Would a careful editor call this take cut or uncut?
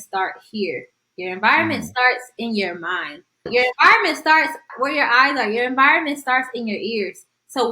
cut